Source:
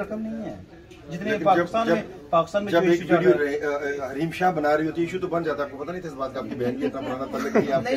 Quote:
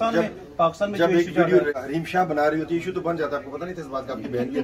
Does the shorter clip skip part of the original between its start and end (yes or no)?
yes